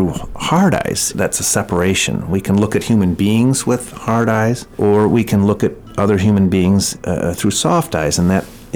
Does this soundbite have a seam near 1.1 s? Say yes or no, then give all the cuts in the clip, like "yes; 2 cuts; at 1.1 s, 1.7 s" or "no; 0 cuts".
yes; 3 cuts; at 1.1 s, 4.7 s, 6.9 s